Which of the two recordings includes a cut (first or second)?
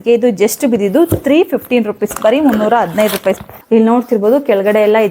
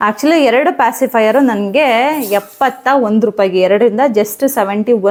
first